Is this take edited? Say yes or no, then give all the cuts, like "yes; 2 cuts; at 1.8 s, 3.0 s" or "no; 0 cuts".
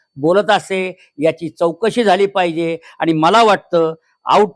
no; 0 cuts